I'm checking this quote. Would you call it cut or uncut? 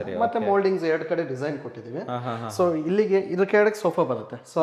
uncut